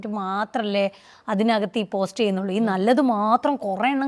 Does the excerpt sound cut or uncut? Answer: uncut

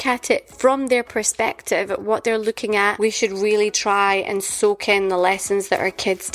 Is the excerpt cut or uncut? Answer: cut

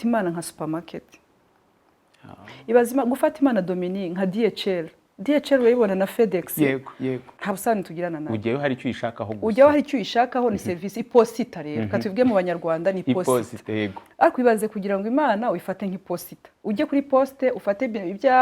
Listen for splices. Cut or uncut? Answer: cut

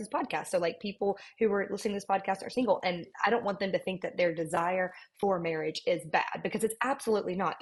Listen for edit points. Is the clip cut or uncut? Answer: uncut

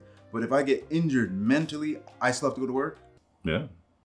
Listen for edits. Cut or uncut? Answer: uncut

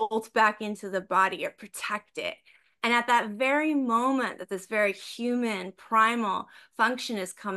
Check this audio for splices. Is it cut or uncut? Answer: uncut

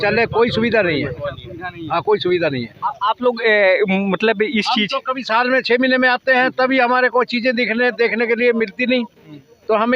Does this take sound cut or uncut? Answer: uncut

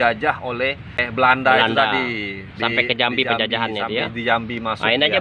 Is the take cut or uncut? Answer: cut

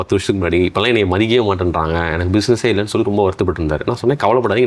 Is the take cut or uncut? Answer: uncut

